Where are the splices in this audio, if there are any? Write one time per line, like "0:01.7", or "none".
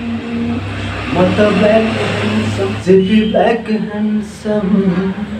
0:02.7